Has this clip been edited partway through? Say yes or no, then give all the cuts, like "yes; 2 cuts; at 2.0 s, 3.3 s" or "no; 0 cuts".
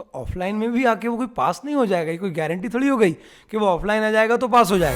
no; 0 cuts